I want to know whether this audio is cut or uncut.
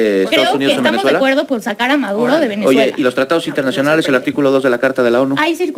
uncut